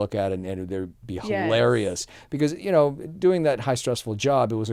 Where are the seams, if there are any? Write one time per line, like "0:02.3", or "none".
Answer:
none